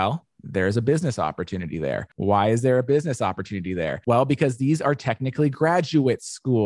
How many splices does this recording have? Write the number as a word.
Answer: two